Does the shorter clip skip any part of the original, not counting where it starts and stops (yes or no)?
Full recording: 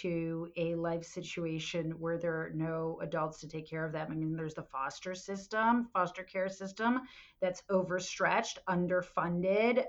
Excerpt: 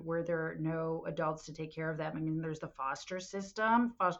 no